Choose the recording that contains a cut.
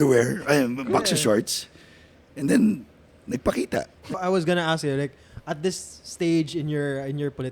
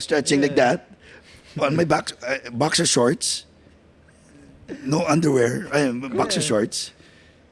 first; 1 cut; at 4.2 s

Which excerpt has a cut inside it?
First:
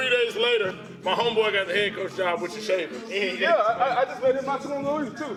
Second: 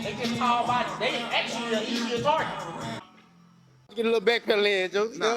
second; 1 cut; at 3.0 s

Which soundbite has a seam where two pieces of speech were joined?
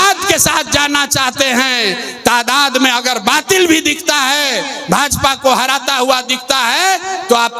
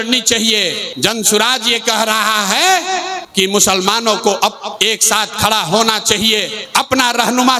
second; 4 cuts; at 0.9 s, 3.2 s, 4.7 s, 6.6 s

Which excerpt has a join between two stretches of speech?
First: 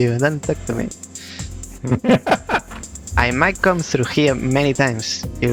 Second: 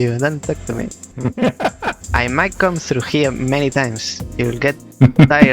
second; 2 cuts; at 1.0 s, 2.0 s

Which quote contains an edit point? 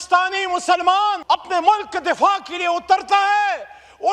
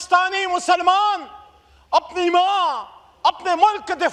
first; 1 cut; at 1.2 s

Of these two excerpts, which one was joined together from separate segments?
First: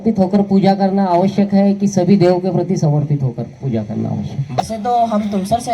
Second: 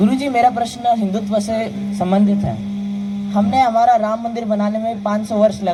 first; 1 cut; at 4.6 s

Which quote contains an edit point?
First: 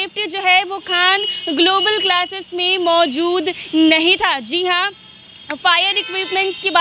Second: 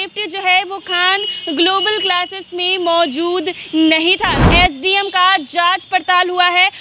second; 1 cut; at 4.4 s

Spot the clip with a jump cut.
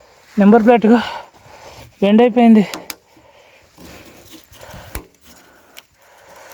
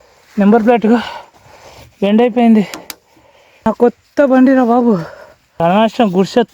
second; 2 cuts; at 3.7 s, 5.6 s

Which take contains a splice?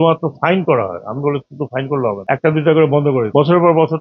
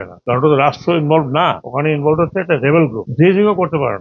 second; 1 cut; at 3.0 s

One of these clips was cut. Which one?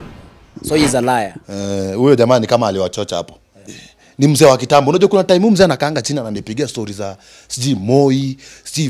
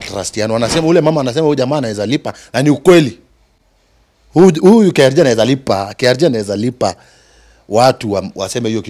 first; 1 cut; at 3.6 s

